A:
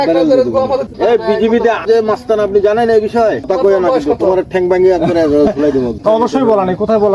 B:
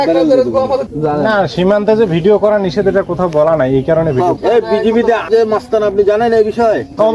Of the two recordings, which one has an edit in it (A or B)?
A